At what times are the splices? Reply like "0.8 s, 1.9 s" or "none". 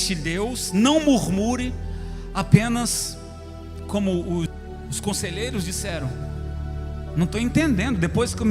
4.6 s